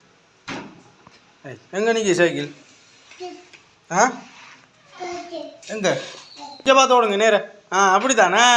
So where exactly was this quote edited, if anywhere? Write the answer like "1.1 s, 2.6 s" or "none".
6.6 s